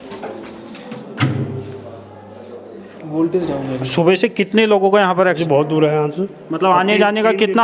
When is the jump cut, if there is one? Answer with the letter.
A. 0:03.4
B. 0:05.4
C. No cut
B